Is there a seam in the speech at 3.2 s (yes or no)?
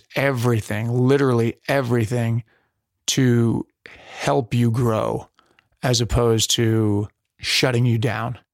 no